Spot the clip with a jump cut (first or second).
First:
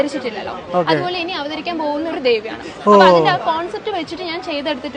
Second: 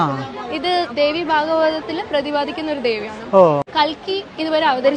second